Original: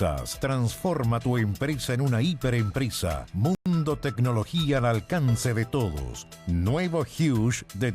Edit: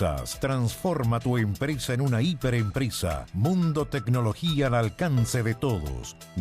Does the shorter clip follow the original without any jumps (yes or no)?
no